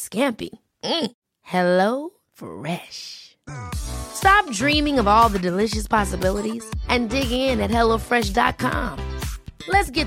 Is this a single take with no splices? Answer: yes; 0 cuts

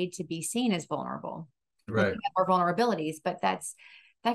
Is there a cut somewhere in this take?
no; 0 cuts

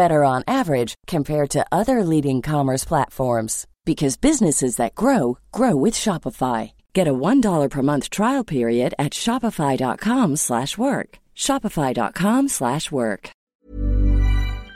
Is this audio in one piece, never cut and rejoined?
no; 1 cut; at 13.3 s

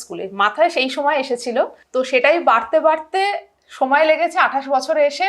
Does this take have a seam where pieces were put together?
yes; 1 cut; at 1.8 s

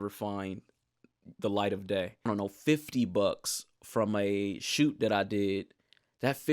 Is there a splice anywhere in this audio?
yes; 1 cut; at 2.2 s

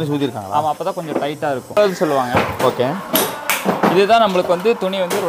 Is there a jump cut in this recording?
yes; 1 cut; at 1.8 s

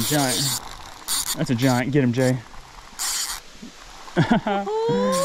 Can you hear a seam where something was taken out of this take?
no; 0 cuts

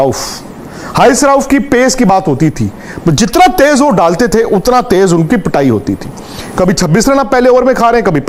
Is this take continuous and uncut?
yes; 0 cuts

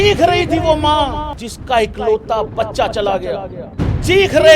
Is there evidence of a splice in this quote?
yes; 2 cuts; at 1.3 s, 3.6 s

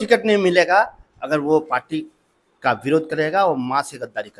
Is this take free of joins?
yes; 0 cuts

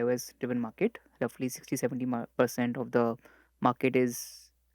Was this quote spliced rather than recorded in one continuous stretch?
no; 0 cuts

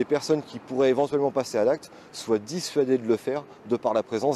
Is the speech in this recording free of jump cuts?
yes; 0 cuts

